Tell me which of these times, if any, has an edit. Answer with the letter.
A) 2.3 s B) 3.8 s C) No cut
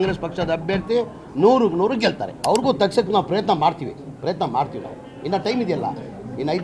A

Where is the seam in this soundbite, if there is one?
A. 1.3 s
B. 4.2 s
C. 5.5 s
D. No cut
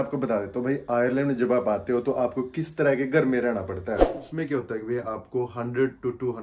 B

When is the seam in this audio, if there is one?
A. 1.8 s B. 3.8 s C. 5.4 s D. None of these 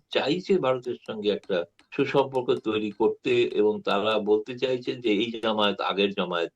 A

